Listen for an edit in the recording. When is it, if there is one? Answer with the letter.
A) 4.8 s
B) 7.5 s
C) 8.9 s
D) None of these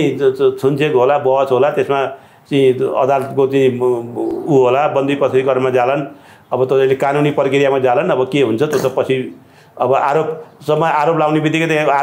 D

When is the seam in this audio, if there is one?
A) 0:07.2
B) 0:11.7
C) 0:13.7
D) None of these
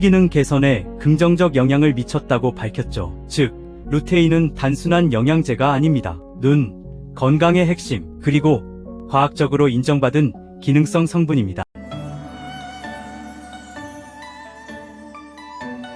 B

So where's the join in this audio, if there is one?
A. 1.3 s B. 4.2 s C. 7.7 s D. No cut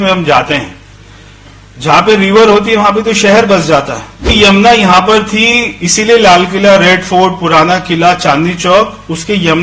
B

